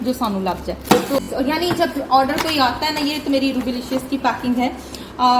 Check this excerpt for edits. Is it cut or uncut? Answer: cut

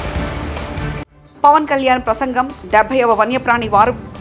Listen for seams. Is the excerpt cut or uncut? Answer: cut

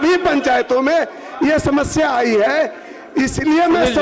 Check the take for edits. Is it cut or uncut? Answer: uncut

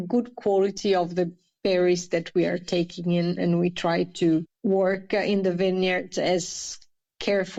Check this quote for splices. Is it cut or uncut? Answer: uncut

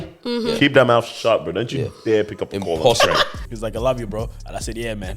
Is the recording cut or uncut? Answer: cut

